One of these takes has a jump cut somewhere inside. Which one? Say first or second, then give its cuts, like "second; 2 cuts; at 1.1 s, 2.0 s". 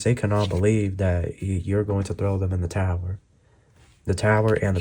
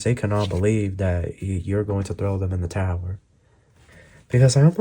second; 1 cut; at 3.9 s